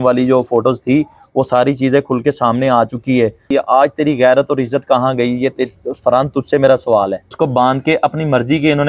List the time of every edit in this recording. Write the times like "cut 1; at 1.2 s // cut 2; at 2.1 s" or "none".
cut 1; at 3.4 s // cut 2; at 7.2 s